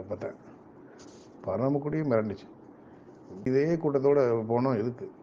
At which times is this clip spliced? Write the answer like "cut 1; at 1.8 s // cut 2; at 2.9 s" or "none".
cut 1; at 3.5 s